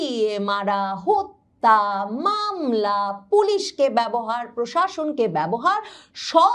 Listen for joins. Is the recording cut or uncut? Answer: uncut